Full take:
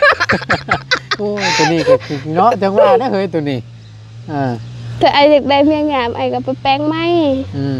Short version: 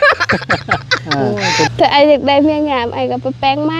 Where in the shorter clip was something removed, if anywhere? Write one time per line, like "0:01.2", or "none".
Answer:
0:01.7